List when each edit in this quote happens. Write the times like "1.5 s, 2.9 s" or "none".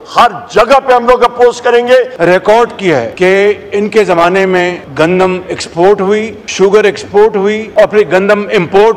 2.1 s, 3.1 s, 4.8 s, 6.4 s, 7.6 s